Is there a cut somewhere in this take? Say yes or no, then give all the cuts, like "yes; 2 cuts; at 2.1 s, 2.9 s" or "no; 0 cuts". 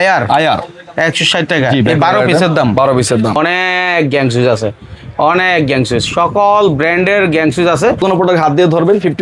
yes; 2 cuts; at 3.4 s, 8.0 s